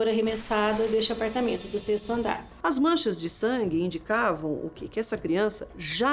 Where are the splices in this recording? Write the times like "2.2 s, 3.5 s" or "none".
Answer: 0.9 s, 2.5 s